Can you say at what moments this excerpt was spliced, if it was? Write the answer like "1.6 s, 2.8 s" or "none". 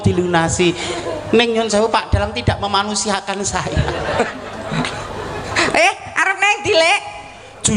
4.3 s